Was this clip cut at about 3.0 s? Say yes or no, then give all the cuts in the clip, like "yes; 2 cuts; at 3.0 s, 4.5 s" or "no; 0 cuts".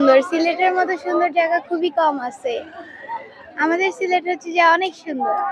no; 0 cuts